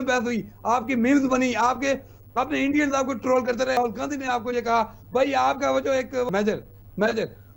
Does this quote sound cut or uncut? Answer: cut